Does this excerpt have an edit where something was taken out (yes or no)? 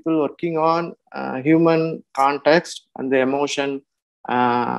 no